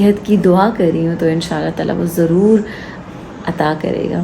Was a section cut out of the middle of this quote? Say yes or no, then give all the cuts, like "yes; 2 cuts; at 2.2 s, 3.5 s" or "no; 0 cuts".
no; 0 cuts